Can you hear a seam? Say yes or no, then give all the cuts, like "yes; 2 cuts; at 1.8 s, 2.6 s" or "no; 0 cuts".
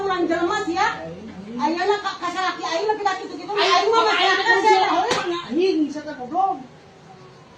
no; 0 cuts